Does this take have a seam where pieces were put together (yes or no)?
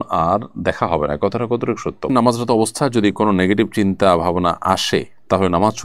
yes